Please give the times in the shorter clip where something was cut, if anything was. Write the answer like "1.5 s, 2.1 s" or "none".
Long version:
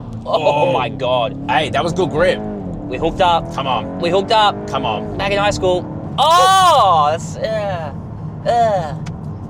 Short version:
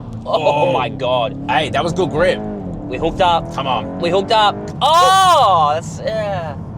4.7 s